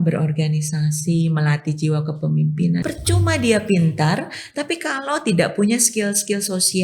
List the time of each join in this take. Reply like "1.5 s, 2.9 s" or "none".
2.8 s